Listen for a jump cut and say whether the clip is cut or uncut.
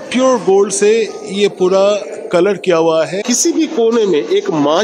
cut